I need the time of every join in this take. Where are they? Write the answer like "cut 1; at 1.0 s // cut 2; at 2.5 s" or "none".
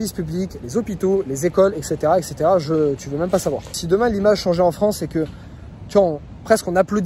cut 1; at 3.8 s